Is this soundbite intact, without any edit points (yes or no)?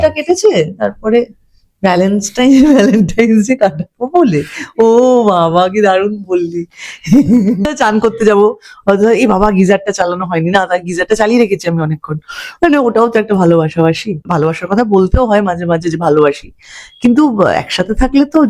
no